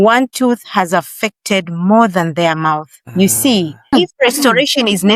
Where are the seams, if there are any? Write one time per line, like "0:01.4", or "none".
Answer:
0:03.9

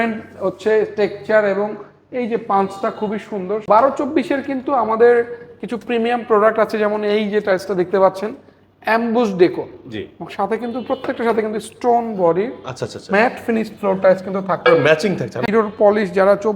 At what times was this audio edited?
0:03.6
0:15.4

